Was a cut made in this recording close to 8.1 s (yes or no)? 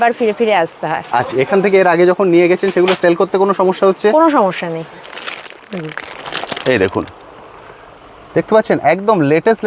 no